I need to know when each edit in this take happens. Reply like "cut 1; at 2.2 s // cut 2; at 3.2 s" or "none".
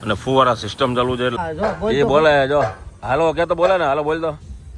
cut 1; at 1.3 s